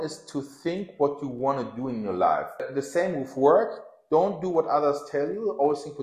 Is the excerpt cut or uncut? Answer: cut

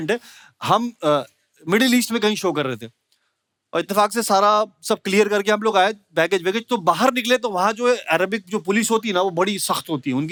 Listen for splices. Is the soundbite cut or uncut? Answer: uncut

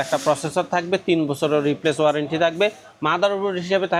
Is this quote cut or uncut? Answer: uncut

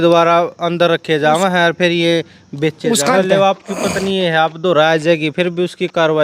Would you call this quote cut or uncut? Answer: cut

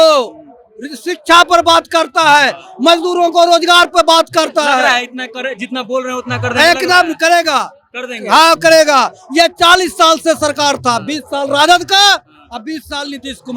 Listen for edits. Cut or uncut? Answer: uncut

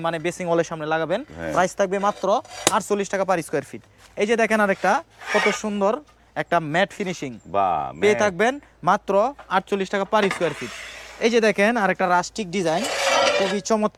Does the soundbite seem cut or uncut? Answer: uncut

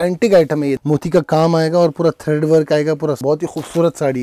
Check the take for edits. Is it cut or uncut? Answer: cut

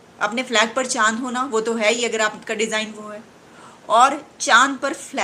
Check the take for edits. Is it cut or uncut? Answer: uncut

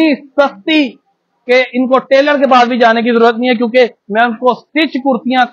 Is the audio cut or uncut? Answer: uncut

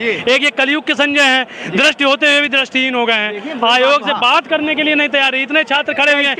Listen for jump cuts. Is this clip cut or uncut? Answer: uncut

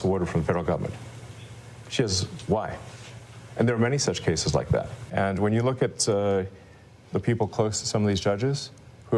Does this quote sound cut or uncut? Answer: cut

